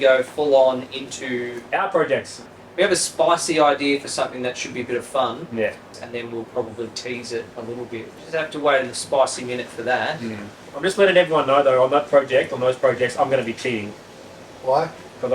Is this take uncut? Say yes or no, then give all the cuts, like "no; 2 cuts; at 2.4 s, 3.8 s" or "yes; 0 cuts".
no; 3 cuts; at 2.5 s, 5.9 s, 8.2 s